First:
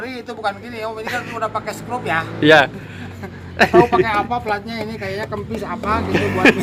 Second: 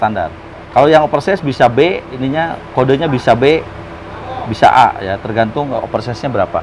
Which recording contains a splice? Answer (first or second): second